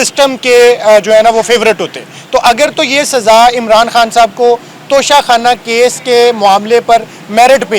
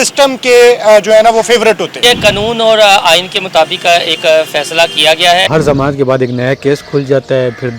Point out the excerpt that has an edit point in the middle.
second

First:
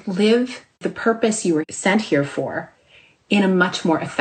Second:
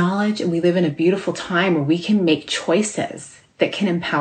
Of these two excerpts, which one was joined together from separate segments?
first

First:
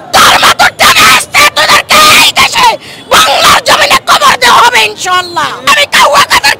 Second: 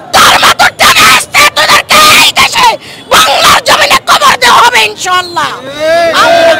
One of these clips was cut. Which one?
first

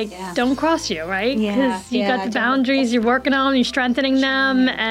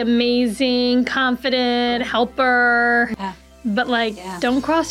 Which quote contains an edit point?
second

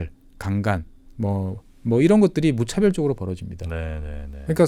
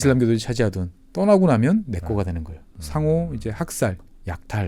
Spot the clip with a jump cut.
second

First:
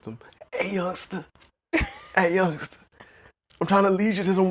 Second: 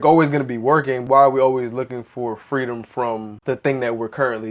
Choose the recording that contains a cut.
second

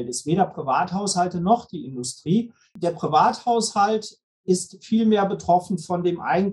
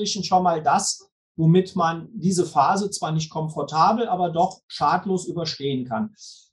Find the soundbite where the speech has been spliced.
first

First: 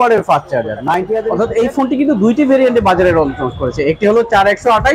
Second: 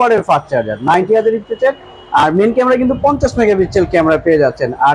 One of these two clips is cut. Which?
first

